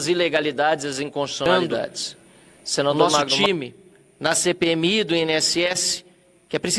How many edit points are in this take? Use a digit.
1